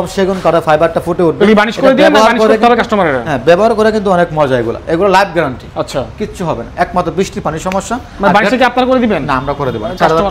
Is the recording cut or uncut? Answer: uncut